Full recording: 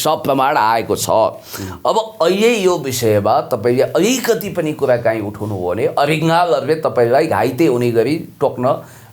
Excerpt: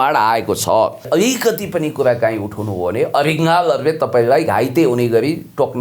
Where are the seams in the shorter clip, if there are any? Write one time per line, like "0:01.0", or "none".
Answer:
0:01.1